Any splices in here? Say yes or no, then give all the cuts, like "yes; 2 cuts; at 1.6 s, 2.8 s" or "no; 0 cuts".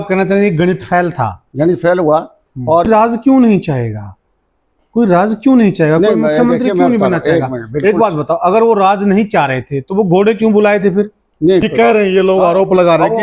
yes; 2 cuts; at 2.9 s, 11.7 s